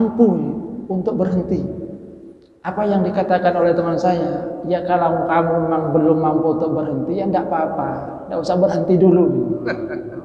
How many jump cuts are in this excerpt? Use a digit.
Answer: 0